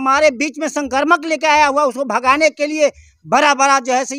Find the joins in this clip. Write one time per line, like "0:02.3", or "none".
none